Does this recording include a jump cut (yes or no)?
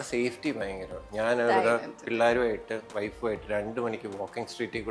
no